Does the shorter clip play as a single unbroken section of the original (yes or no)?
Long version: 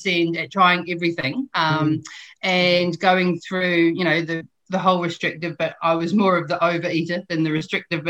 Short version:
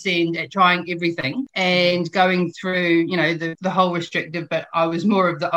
no